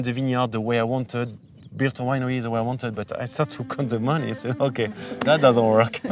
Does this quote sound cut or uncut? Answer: uncut